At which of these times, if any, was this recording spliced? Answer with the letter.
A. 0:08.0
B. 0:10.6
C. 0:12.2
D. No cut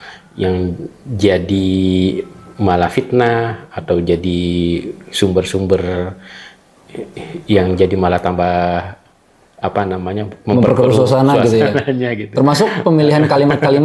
D